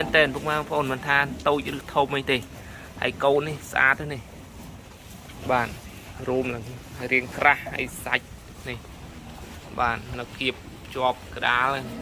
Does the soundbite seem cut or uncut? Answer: uncut